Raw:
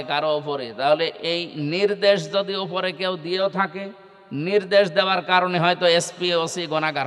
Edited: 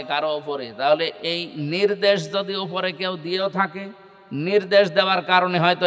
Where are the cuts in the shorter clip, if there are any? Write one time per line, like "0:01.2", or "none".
none